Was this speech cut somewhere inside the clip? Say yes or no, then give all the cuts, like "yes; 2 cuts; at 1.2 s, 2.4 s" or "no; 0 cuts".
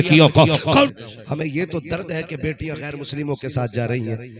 yes; 1 cut; at 0.9 s